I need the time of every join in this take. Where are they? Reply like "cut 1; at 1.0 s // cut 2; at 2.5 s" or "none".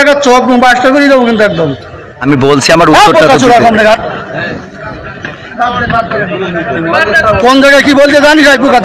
cut 1; at 2.2 s